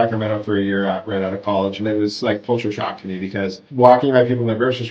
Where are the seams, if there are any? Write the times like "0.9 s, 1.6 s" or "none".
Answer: none